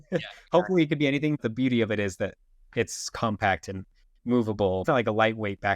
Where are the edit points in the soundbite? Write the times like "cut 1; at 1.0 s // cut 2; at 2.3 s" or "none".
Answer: cut 1; at 1.4 s // cut 2; at 4.8 s